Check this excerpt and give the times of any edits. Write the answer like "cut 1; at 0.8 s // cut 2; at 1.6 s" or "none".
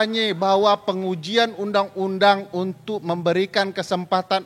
none